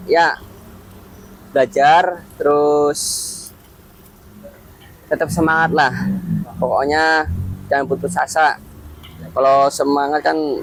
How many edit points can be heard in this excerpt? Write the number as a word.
zero